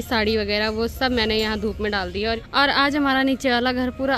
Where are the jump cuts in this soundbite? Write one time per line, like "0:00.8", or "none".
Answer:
0:02.4